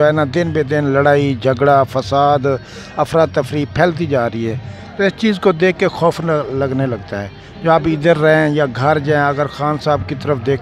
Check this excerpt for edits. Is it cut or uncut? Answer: uncut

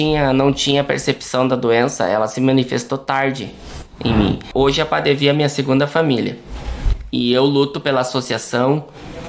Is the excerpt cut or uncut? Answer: cut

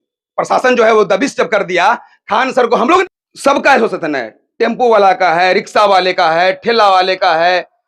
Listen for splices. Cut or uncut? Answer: cut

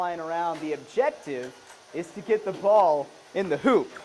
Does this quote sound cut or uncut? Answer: uncut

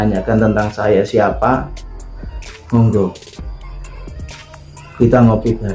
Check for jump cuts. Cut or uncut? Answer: uncut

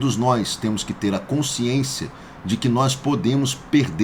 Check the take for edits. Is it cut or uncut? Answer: uncut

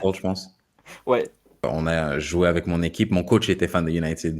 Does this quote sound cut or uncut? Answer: cut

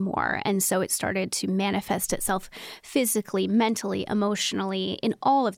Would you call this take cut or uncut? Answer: uncut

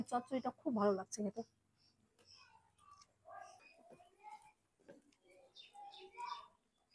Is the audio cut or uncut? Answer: cut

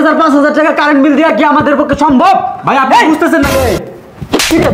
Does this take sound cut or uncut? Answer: cut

